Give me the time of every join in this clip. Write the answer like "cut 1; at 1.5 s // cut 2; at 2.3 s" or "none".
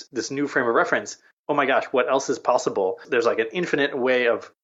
cut 1; at 3.1 s